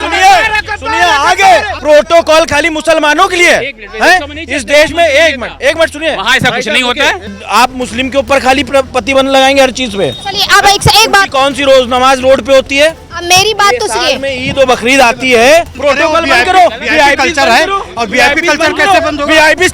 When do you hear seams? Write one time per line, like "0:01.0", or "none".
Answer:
0:01.7
0:07.3
0:15.7

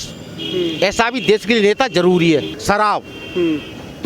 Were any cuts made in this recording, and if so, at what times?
0:02.5

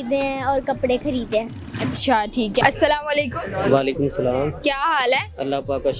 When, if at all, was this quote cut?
none

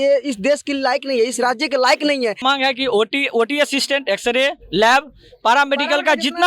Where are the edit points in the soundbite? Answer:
0:02.4

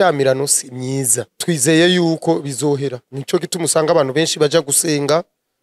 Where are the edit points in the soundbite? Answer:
0:01.3
0:03.1

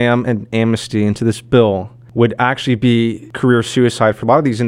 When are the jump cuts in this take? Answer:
0:02.0
0:03.3

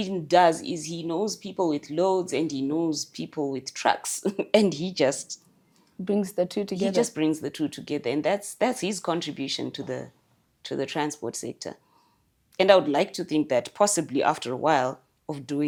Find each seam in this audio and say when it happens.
none

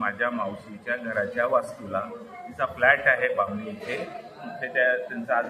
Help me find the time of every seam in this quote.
none

